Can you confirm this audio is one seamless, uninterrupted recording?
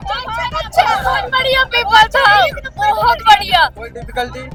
yes; 0 cuts

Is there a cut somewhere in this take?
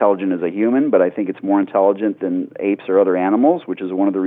no; 0 cuts

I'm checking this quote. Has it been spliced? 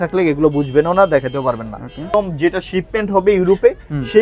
yes; 1 cut; at 2.1 s

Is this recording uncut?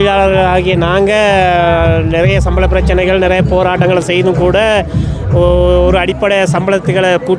yes; 0 cuts

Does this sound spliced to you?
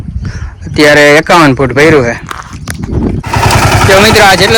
yes; 1 cut; at 3.3 s

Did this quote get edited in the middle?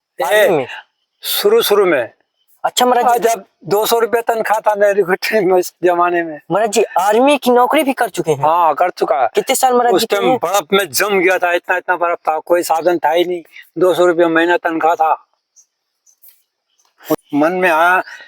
yes; 1 cut; at 17.2 s

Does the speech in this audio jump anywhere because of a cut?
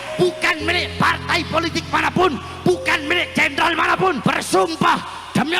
yes; 1 cut; at 4.2 s

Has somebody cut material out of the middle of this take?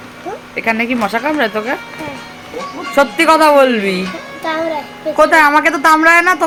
no; 0 cuts

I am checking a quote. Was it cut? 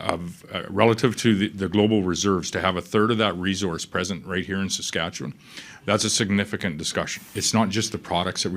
yes; 1 cut; at 7.2 s

